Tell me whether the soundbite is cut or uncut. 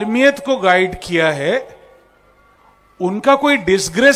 uncut